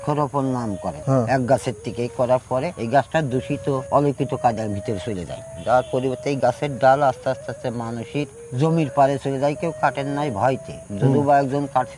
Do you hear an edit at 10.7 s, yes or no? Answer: no